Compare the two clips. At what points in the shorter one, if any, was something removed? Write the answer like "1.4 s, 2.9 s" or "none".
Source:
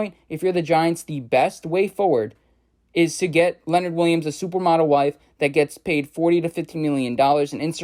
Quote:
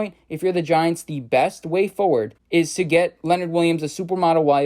2.4 s